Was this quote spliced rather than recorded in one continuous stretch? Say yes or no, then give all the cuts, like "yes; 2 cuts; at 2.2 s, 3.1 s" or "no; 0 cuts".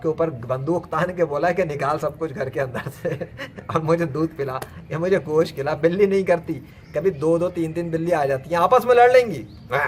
no; 0 cuts